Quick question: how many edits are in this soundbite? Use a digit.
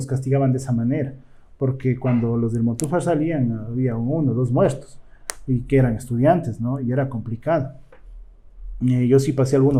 0